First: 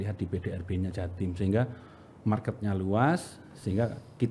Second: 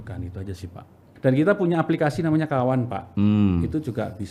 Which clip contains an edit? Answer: second; 1 cut; at 1.0 s

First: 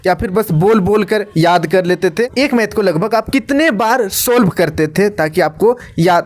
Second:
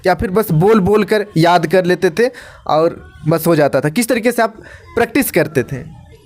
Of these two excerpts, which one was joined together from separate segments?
first; 1 cut; at 2.3 s

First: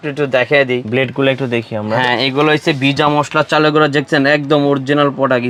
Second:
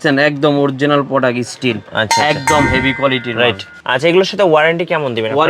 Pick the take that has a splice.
second; 1 cut; at 3.8 s

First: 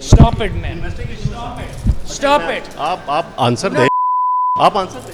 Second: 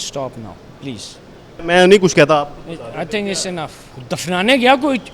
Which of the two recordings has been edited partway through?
second; 2 cuts; at 1.6 s, 3.9 s

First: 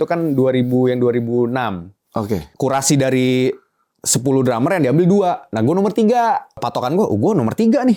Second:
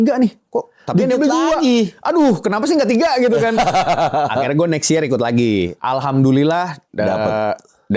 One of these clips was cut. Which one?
first; 2 cuts; at 2.4 s, 6.6 s

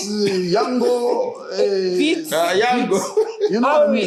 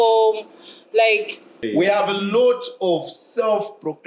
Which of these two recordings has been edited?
second; 1 cut; at 1.6 s

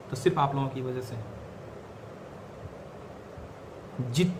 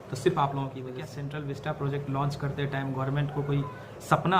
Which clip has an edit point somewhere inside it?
second; 1 cut; at 1.2 s

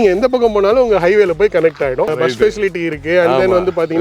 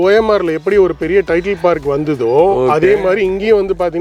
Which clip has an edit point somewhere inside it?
first; 1 cut; at 2.1 s

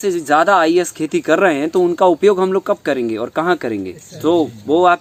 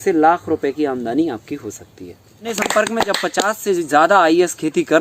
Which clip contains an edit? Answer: second; 1 cut; at 2.5 s

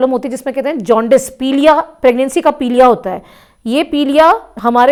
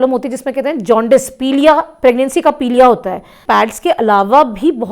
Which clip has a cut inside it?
second; 1 cut; at 3.3 s

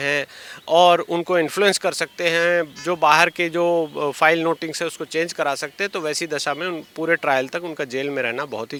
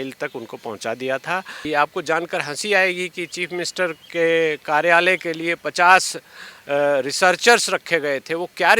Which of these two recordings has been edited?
second; 1 cut; at 1.6 s

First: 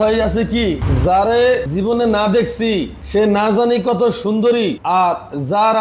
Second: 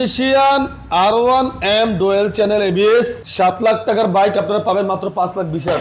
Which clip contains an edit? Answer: first; 3 cuts; at 0.8 s, 1.7 s, 3.0 s

